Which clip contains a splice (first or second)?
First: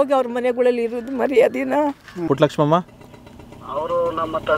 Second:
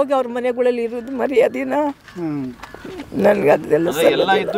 first